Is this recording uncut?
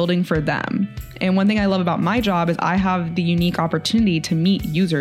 yes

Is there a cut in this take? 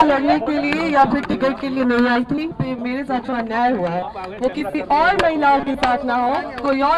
yes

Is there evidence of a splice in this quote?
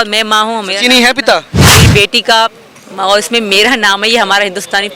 yes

